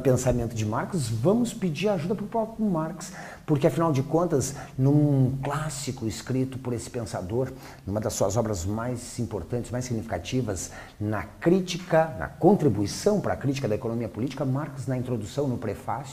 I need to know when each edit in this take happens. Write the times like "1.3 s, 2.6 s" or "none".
2.9 s